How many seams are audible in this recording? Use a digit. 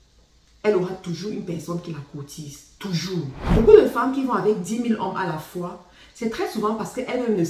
1